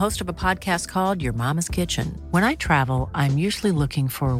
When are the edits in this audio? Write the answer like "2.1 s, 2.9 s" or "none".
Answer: none